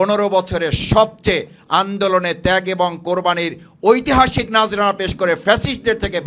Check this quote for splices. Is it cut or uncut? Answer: uncut